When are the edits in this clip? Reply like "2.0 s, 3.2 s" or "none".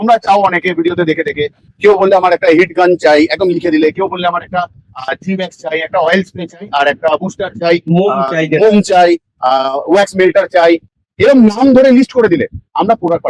none